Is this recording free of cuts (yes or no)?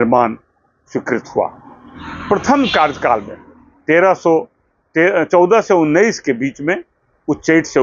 yes